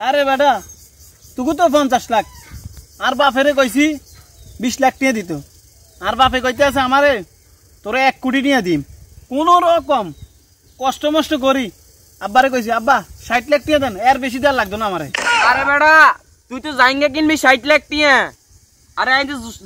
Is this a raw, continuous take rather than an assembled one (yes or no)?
no